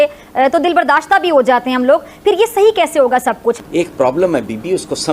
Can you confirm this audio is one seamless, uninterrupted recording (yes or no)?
no